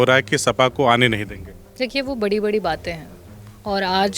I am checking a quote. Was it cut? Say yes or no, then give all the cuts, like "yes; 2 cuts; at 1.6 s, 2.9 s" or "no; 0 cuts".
no; 0 cuts